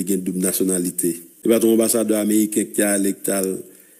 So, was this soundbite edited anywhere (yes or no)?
yes